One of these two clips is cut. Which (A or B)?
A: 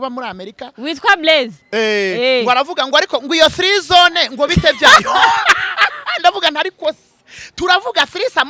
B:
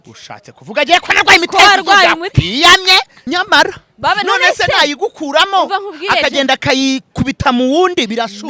B